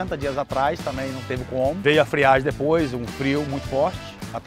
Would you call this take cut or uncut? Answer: cut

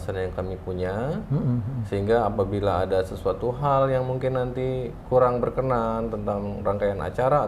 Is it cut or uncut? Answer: uncut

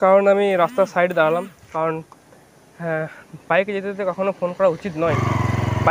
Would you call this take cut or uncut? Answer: cut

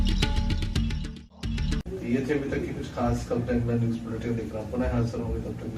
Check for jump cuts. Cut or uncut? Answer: uncut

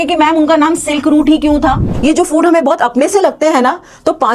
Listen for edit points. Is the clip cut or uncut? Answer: cut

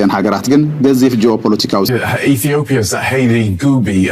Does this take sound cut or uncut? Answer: cut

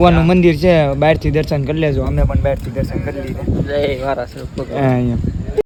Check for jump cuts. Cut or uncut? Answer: uncut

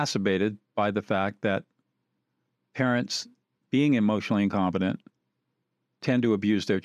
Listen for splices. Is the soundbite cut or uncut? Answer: uncut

